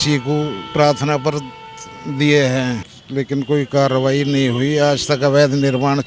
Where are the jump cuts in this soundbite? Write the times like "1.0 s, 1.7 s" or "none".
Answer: 2.9 s